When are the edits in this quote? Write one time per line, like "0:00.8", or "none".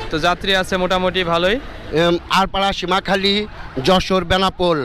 0:01.8